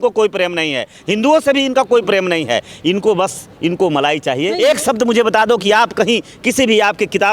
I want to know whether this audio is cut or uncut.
cut